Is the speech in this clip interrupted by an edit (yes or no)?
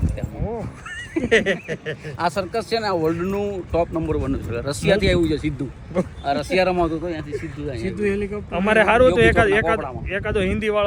no